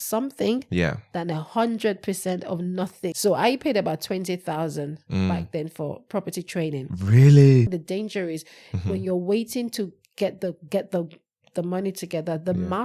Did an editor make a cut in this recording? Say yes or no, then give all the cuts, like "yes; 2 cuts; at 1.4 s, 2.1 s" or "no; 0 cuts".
yes; 2 cuts; at 3.1 s, 7.7 s